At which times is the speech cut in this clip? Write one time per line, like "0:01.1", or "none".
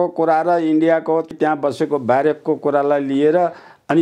0:01.3